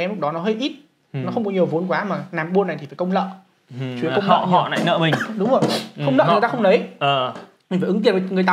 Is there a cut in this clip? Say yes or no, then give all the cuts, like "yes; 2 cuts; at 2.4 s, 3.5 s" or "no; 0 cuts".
no; 0 cuts